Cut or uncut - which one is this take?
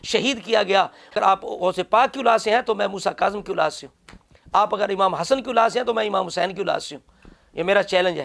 cut